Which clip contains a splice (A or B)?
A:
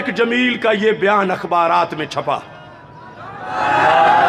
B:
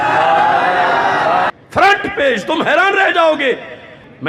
B